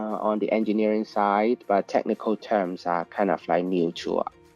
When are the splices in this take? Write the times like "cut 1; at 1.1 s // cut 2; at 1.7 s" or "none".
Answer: cut 1; at 1.9 s